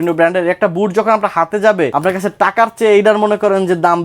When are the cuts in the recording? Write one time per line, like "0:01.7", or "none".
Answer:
0:01.9

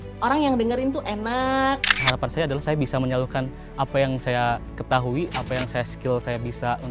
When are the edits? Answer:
0:02.0

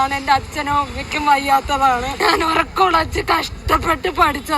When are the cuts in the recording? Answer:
0:02.1

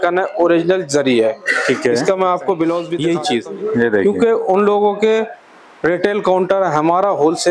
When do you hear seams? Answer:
0:02.9

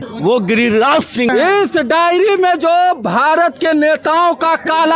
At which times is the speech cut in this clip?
0:01.3

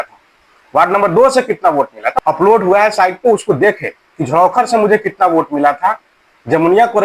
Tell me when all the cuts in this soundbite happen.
0:02.0

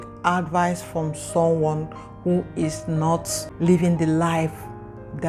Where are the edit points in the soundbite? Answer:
0:03.4

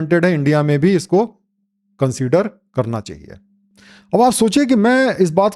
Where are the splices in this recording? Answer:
none

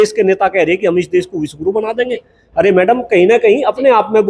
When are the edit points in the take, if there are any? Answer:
none

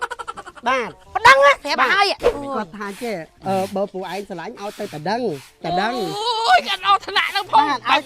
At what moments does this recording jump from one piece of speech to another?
0:02.2

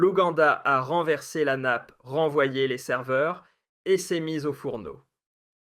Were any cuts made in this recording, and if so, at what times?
none

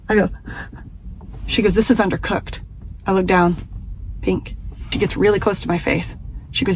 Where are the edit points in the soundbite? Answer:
0:04.5

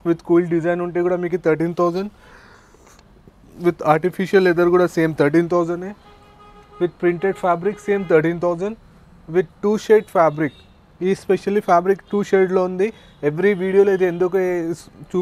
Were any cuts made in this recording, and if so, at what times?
none

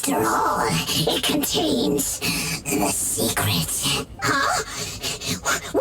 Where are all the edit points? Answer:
none

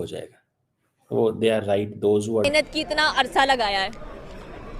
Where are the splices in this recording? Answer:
0:02.4

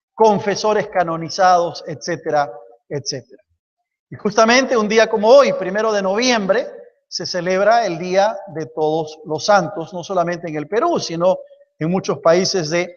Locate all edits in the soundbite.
none

